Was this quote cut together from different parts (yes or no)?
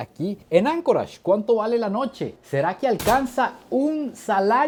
no